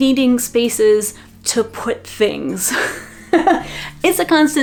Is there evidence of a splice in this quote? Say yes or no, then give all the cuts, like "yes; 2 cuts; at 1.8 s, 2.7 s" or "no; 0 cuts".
no; 0 cuts